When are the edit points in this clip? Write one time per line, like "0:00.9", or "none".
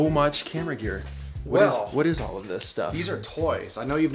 none